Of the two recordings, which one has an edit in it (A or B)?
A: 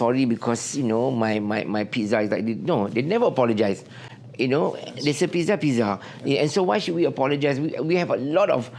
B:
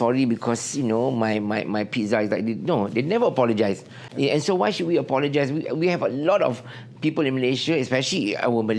B